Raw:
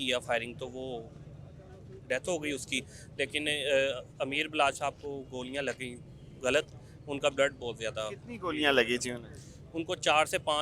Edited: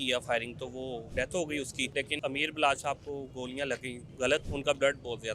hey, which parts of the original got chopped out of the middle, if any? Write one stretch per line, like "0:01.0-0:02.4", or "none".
0:01.1-0:02.0
0:03.0-0:04.1
0:06.2-0:06.8

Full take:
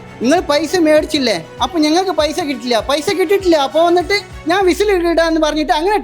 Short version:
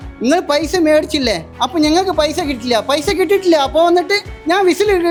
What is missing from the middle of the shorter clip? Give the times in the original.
none

